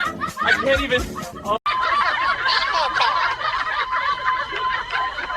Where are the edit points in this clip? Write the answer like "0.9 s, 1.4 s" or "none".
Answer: none

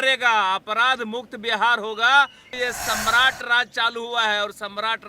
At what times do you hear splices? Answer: 2.4 s

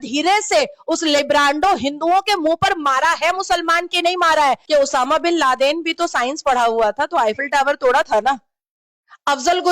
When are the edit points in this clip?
4.6 s

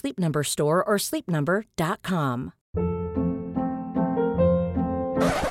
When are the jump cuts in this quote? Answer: 2.6 s

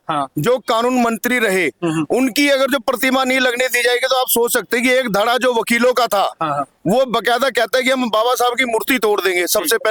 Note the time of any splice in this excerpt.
none

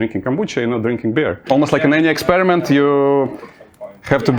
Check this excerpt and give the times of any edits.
1.4 s

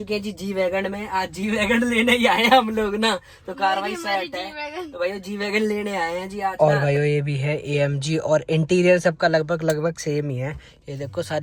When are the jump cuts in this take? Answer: 6.5 s

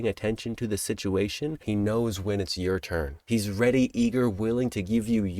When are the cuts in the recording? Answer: 1.6 s, 3.2 s

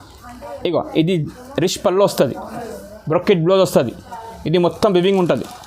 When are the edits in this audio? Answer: none

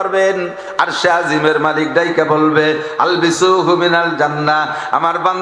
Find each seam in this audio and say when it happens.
none

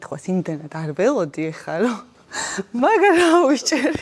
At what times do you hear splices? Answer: none

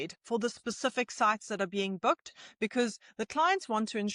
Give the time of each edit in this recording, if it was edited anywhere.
none

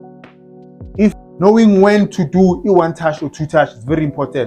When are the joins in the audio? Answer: 1.0 s

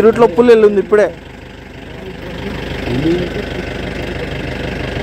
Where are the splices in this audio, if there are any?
none

